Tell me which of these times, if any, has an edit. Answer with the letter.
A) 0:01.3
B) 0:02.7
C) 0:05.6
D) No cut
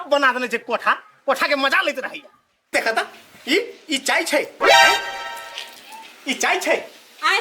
B